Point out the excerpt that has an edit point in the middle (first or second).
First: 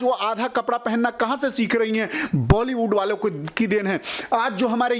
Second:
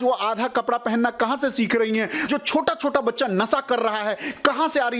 second